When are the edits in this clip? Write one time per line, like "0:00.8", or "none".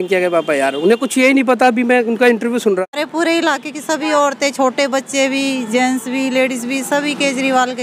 0:02.8

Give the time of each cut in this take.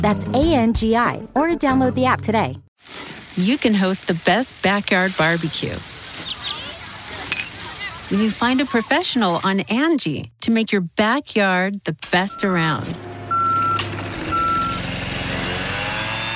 0:02.6

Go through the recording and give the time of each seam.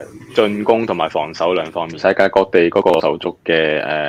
0:02.0

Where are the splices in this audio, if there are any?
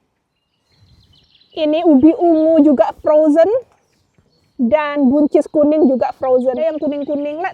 0:06.6

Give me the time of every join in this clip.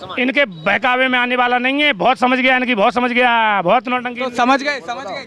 none

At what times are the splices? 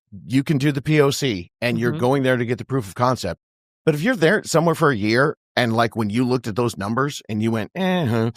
none

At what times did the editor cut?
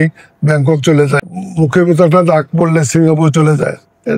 0:01.4

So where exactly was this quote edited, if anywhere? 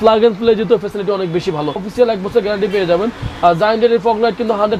0:01.8

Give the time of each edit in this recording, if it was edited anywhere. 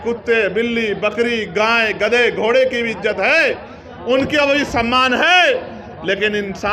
none

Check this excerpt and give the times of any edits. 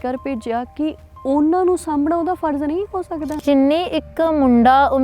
0:03.4

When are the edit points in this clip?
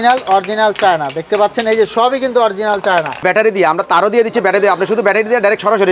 0:03.2

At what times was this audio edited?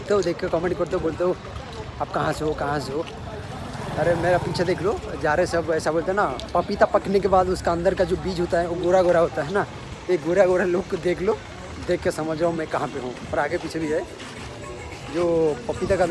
none

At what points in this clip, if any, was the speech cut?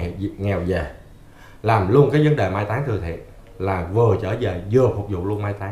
none

